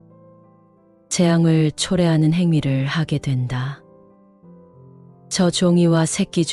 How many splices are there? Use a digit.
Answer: 2